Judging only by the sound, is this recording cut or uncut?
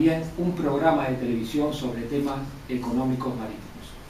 uncut